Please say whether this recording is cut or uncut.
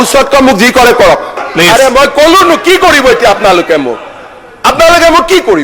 cut